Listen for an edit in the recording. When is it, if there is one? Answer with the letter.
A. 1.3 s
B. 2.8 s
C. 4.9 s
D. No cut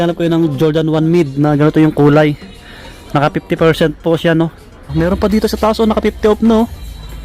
C